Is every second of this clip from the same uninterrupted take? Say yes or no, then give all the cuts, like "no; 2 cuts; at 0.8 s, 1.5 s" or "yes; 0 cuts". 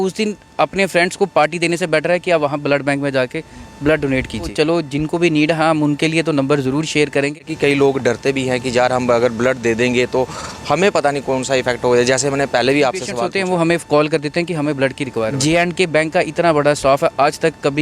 no; 4 cuts; at 4.5 s, 7.5 s, 13.2 s, 15.3 s